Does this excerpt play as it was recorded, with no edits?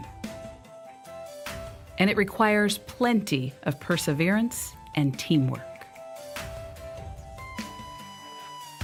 yes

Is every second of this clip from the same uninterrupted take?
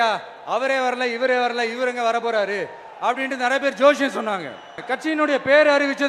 no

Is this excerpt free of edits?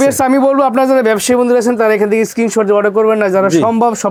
yes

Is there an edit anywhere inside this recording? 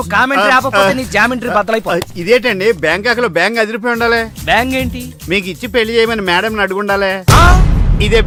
no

